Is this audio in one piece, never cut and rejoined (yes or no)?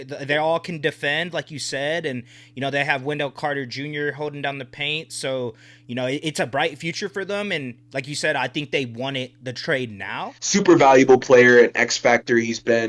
no